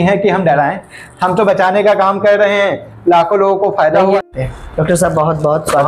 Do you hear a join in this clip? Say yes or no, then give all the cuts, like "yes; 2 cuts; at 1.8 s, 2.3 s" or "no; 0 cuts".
yes; 1 cut; at 4.2 s